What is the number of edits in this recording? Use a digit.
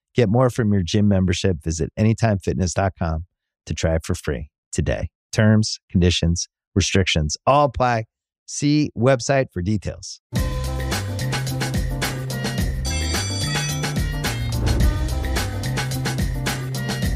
1